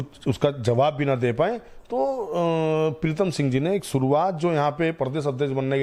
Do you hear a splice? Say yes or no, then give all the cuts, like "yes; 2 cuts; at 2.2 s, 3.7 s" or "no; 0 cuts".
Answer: no; 0 cuts